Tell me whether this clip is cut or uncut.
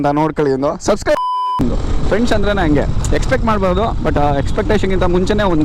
cut